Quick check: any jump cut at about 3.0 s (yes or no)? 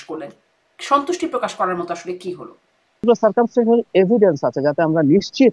yes